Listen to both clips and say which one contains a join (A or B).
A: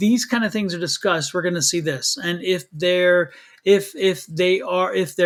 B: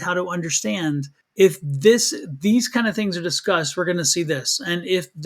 B